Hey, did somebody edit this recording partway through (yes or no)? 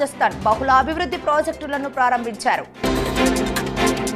yes